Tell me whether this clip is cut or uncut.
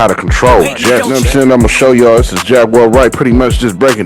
cut